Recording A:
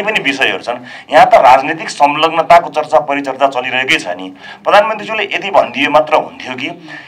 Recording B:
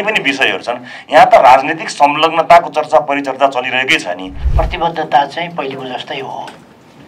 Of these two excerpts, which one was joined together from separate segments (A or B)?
B